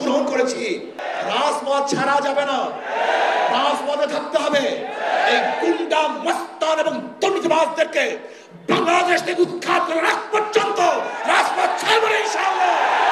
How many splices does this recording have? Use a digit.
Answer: 1